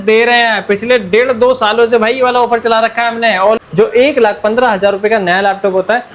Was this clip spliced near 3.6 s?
yes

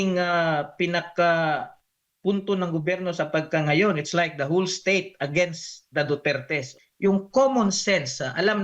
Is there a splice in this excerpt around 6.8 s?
yes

